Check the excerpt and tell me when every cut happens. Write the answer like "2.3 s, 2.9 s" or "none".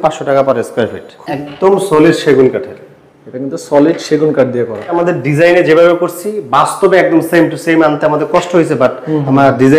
1.1 s, 5.0 s